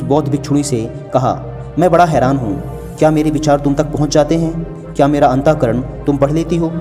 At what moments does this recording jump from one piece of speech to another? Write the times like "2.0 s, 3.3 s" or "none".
none